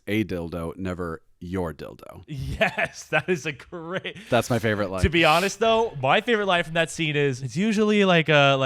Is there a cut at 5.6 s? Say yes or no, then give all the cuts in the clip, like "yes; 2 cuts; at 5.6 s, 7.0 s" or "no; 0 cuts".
no; 1 cut; at 7.4 s